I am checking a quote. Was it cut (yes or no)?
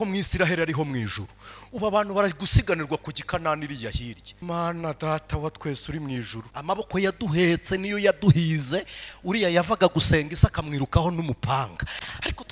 yes